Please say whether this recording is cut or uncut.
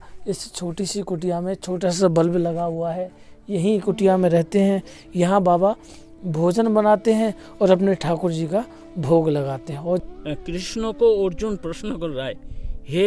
cut